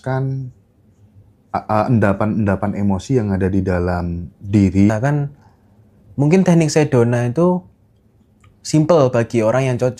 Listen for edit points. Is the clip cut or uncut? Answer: cut